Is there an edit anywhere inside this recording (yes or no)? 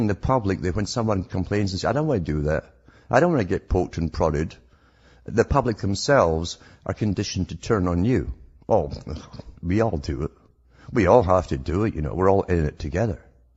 no